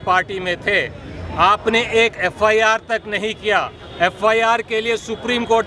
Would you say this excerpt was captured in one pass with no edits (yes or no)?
yes